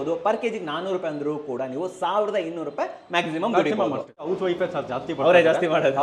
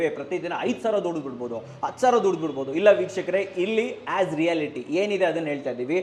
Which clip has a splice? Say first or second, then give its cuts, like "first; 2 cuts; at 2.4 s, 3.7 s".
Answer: first; 1 cut; at 4.3 s